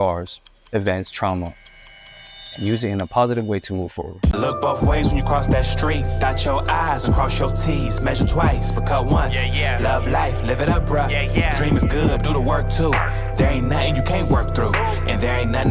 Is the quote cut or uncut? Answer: cut